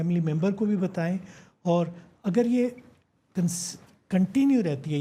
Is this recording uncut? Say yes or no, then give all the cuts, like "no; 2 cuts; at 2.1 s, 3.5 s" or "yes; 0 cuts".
yes; 0 cuts